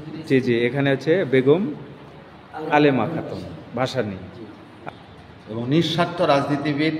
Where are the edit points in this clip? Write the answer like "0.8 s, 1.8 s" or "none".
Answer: 4.7 s